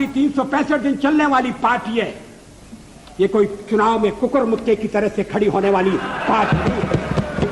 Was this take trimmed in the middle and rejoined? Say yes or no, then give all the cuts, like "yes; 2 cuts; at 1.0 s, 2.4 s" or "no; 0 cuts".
no; 0 cuts